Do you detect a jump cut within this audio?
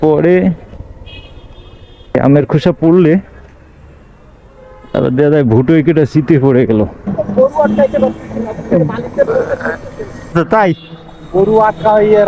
yes; 3 cuts; at 0.7 s, 2.2 s, 7.1 s

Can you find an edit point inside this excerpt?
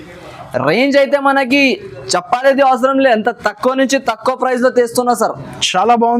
no; 0 cuts

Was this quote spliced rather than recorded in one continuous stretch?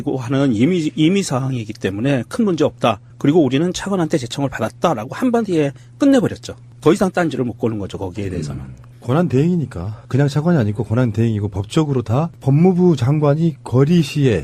yes; 1 cut; at 11.2 s

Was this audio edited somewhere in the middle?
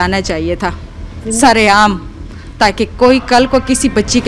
no; 0 cuts

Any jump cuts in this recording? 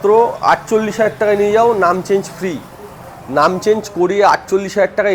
no; 0 cuts

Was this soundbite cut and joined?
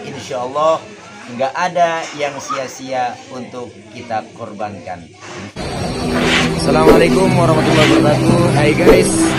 yes; 1 cut; at 5.5 s

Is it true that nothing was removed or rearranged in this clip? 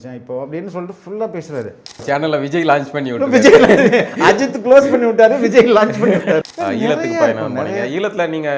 no; 2 cuts; at 2.0 s, 6.4 s

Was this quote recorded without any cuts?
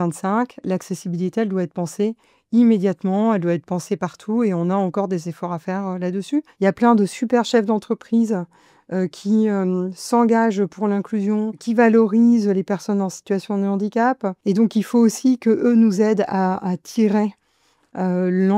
no; 3 cuts; at 6.5 s, 11.6 s, 14.3 s

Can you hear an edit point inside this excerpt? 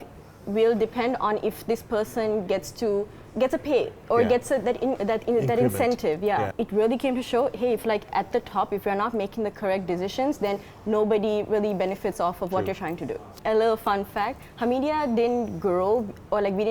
yes; 2 cuts; at 6.6 s, 13.3 s

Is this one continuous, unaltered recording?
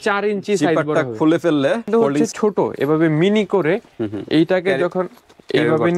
no; 1 cut; at 1.8 s

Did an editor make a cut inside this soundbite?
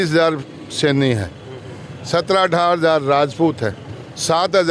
no; 0 cuts

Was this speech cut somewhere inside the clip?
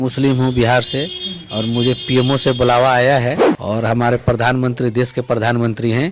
yes; 1 cut; at 3.5 s

